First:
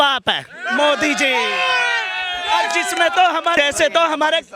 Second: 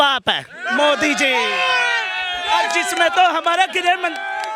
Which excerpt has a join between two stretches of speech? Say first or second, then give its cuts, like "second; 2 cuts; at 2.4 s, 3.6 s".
first; 1 cut; at 3.6 s